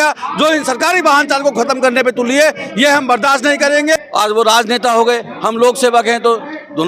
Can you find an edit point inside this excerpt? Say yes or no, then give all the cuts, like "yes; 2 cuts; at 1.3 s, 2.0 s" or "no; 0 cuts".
yes; 1 cut; at 4.0 s